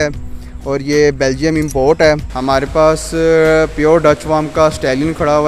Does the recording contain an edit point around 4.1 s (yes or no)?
no